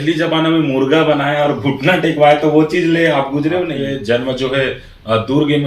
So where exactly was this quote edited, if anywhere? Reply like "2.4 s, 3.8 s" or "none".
3.8 s

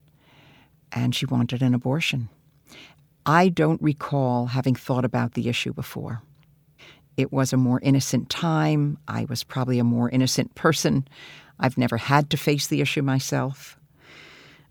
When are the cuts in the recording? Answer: none

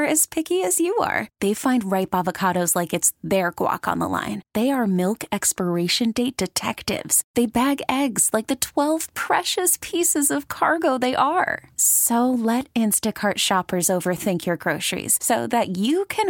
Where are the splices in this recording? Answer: none

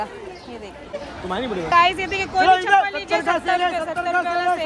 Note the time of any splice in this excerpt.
1.1 s

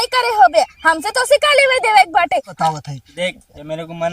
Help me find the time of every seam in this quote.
2.5 s

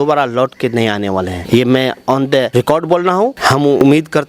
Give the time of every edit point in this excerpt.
1.4 s, 2.5 s, 3.4 s

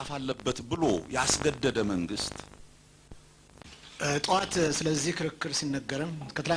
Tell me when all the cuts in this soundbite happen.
3.7 s

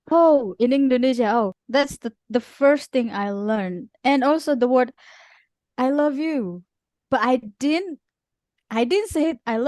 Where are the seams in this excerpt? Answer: 1.6 s

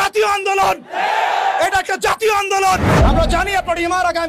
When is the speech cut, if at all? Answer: 2.9 s

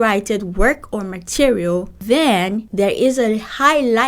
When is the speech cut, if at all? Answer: 1.9 s, 2.6 s

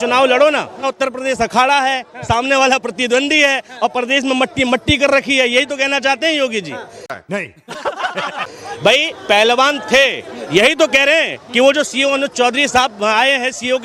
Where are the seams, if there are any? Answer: 0.9 s, 7.2 s, 8.4 s

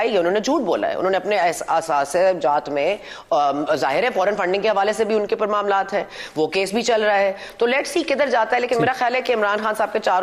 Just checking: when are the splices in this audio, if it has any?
none

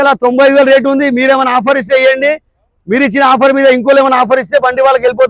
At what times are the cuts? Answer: none

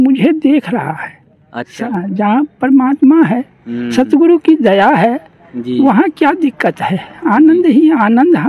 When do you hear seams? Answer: 1.8 s

